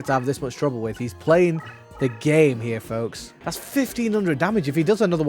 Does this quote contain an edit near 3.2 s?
yes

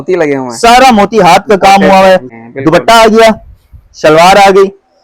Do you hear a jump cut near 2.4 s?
yes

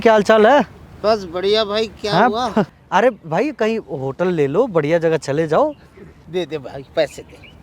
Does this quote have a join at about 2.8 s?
yes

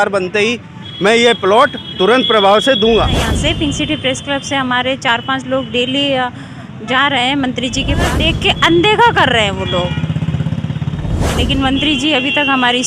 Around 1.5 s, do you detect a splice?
no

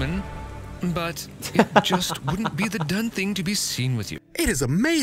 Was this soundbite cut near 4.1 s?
yes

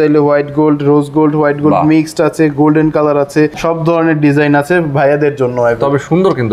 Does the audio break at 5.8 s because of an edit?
yes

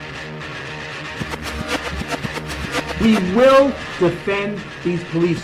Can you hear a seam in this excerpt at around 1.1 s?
yes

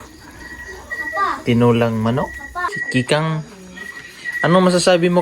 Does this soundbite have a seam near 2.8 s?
yes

